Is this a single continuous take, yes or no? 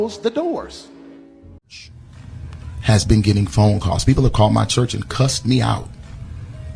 no